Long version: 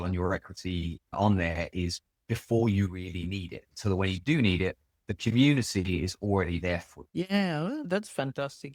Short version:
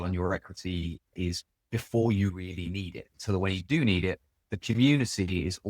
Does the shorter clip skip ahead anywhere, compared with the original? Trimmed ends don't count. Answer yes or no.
yes